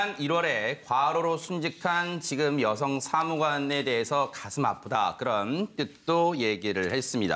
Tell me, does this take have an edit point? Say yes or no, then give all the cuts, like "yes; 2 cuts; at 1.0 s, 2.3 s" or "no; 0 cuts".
no; 0 cuts